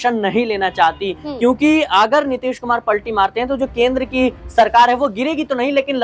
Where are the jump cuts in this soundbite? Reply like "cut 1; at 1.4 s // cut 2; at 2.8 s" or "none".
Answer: none